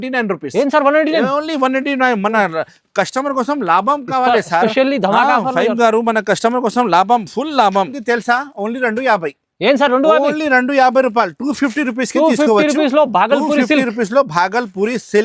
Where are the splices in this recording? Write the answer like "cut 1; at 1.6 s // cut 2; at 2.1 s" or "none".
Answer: cut 1; at 8.0 s